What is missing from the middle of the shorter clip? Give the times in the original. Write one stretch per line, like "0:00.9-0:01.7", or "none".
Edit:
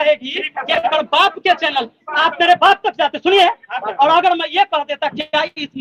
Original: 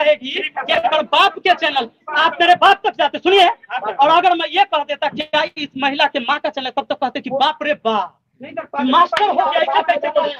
none